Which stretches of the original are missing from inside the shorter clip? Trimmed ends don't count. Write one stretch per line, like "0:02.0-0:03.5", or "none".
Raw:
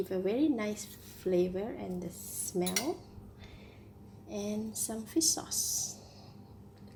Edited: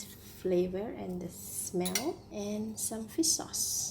0:03.1-0:04.2